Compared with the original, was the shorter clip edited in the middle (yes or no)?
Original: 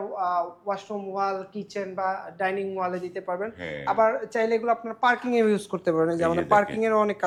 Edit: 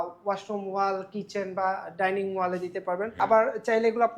yes